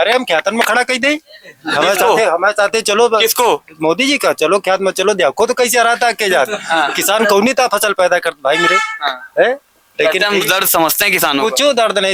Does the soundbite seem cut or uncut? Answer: uncut